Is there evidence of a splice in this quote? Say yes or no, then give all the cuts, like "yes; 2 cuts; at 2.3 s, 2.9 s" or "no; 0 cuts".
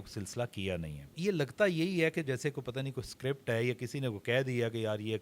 yes; 1 cut; at 1.2 s